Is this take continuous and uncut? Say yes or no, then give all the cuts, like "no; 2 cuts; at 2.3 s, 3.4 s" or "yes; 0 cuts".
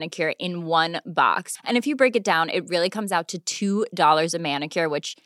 yes; 0 cuts